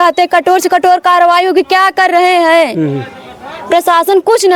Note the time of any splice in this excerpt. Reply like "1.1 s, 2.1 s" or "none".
none